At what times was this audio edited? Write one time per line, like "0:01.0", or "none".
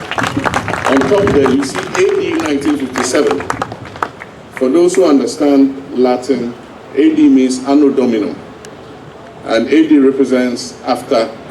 none